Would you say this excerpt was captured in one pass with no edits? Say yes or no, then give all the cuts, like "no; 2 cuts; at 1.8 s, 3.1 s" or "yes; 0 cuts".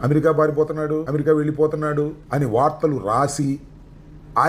no; 2 cuts; at 1.1 s, 2.2 s